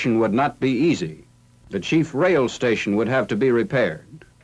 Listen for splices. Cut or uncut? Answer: uncut